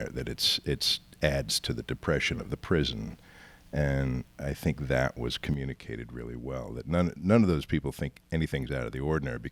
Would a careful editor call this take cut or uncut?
uncut